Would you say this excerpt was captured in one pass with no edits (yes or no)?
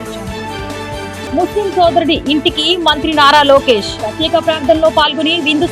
no